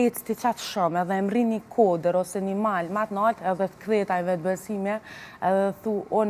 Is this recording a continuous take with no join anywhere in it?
yes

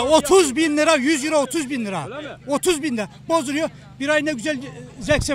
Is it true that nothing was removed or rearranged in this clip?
yes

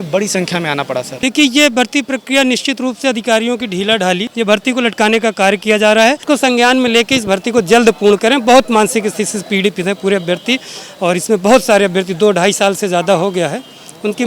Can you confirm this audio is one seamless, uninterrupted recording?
no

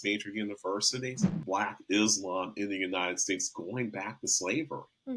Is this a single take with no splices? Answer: no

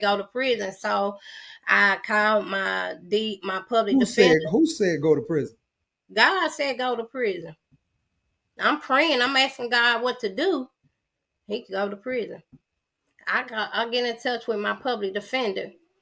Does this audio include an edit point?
no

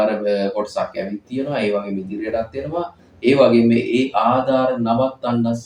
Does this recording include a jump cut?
no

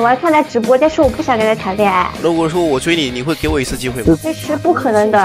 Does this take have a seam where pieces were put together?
yes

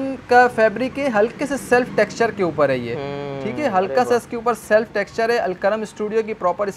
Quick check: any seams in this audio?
no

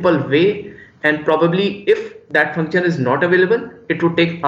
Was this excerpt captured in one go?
yes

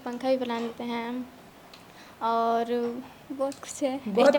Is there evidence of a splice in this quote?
no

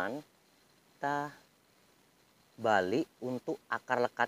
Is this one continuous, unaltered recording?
no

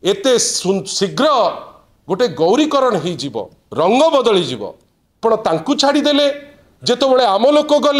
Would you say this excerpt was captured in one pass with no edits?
no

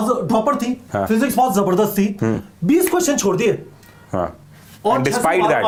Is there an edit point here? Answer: no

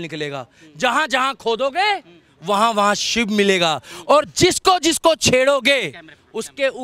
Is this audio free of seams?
yes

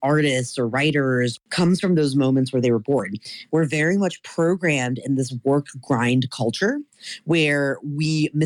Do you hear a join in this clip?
yes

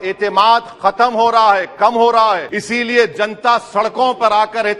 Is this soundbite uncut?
no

